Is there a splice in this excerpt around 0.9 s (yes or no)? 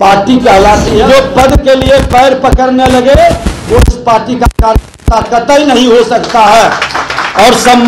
yes